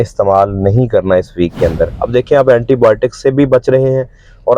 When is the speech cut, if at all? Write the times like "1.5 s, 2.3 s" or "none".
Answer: 1.9 s